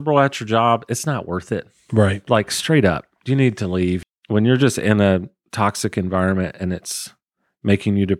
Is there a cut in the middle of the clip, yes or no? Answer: yes